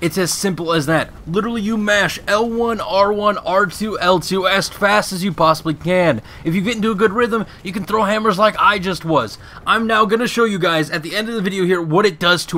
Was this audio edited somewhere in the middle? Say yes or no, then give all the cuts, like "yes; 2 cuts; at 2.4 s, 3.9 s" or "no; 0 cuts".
no; 0 cuts